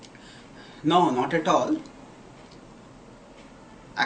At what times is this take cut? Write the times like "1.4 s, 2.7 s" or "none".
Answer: none